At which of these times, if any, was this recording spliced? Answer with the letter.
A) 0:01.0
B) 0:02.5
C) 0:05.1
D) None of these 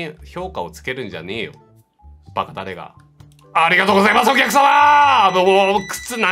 D